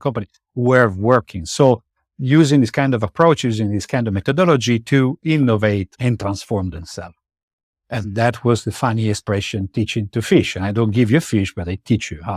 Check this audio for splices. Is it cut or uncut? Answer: cut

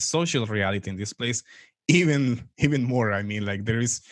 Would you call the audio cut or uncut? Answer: uncut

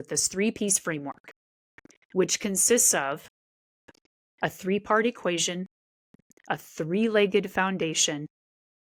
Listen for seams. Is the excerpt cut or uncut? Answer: uncut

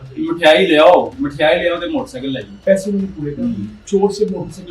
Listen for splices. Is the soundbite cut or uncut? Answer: cut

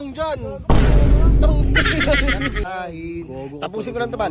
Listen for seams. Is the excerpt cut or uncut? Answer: cut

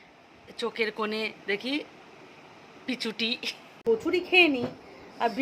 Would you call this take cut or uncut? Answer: cut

